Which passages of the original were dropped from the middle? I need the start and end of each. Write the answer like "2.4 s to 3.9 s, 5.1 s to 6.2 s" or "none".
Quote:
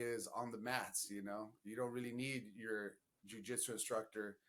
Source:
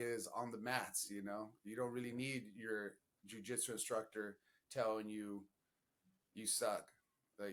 none